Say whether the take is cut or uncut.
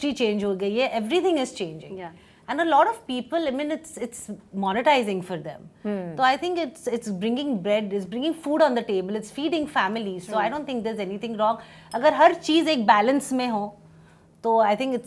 uncut